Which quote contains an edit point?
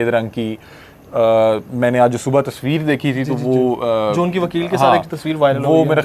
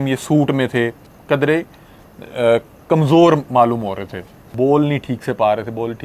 second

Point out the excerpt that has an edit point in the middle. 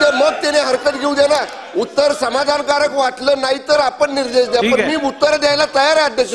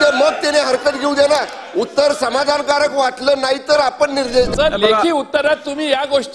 second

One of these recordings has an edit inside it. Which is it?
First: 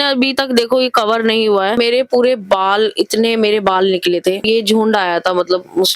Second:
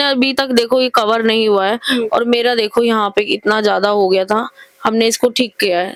first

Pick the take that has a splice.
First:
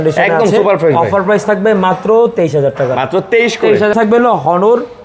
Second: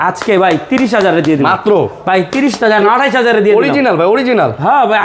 first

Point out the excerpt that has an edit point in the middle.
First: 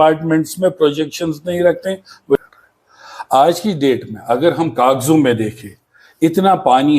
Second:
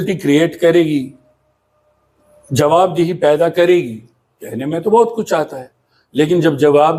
first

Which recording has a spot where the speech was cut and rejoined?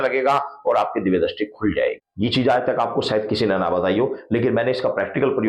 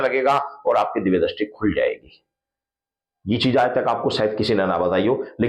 first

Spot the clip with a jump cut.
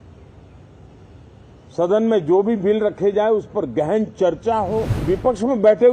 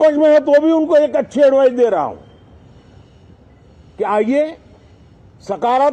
first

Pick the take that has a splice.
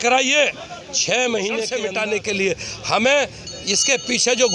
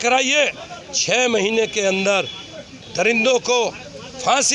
first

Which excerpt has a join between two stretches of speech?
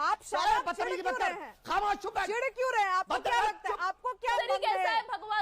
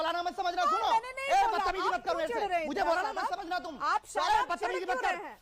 first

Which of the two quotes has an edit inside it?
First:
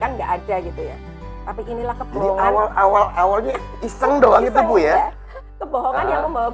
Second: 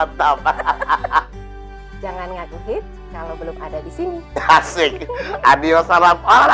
second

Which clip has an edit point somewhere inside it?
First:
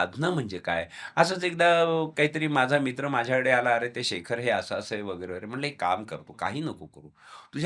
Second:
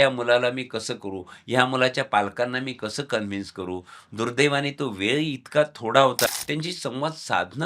second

